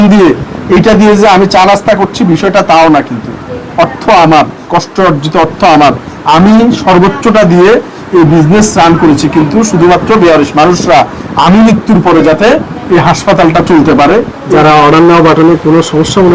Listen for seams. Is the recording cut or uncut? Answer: cut